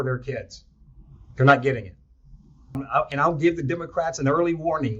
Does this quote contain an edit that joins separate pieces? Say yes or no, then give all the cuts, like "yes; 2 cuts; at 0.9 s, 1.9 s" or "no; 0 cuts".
yes; 1 cut; at 2.8 s